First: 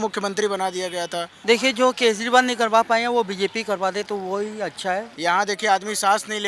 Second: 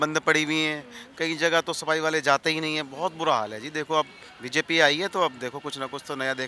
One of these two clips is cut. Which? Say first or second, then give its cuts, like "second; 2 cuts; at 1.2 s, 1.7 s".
first; 2 cuts; at 1.3 s, 5.1 s